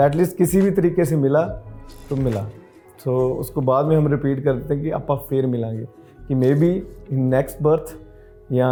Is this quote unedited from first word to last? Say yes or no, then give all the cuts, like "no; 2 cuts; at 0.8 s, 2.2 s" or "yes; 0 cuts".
yes; 0 cuts